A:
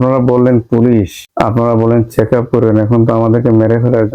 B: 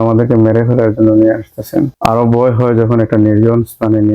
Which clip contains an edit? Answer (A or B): B